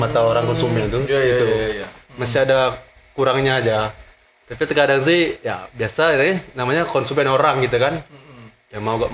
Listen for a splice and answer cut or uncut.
uncut